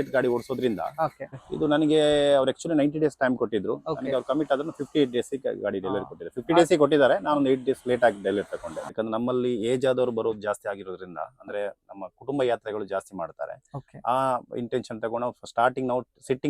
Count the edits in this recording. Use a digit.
2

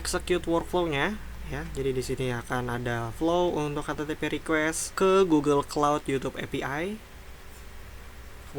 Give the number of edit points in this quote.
1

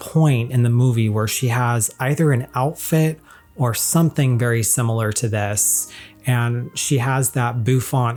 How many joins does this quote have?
0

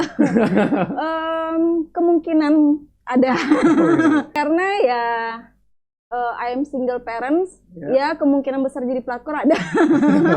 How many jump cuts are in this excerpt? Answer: 1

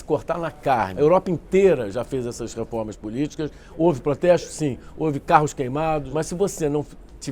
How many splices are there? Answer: 2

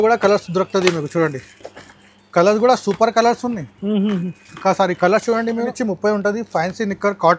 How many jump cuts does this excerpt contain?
1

